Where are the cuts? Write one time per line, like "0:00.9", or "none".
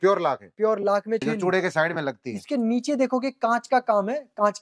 0:01.2